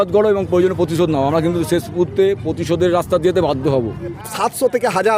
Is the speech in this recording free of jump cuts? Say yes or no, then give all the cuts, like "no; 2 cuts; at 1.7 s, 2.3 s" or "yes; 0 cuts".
no; 1 cut; at 4.2 s